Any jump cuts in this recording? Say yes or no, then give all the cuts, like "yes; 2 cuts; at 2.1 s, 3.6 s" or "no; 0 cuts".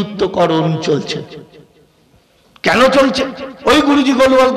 no; 0 cuts